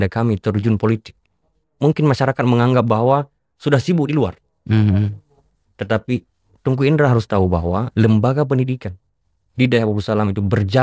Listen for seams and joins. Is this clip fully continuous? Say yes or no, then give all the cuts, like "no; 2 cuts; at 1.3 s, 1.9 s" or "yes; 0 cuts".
yes; 0 cuts